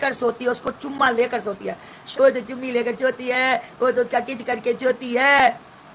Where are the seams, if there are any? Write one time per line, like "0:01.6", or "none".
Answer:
0:02.0